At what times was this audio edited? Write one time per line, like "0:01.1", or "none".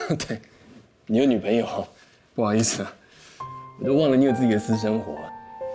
none